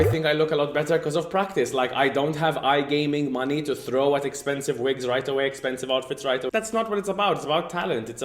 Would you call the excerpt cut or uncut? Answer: cut